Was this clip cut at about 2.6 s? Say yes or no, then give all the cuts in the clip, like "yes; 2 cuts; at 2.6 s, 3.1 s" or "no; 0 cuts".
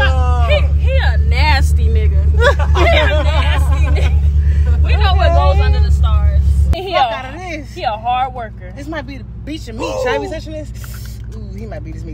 no; 1 cut; at 6.7 s